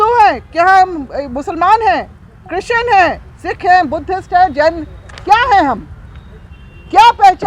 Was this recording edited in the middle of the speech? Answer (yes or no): no